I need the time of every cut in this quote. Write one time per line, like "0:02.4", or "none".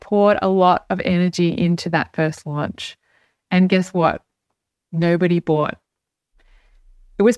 none

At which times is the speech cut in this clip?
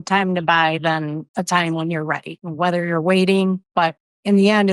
0:01.2
0:02.4
0:03.6

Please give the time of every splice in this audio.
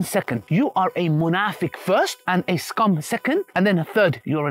none

